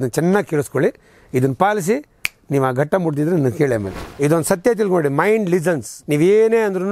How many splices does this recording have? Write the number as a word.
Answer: two